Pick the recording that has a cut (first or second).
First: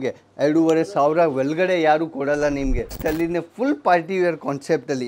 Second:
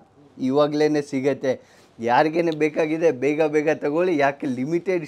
first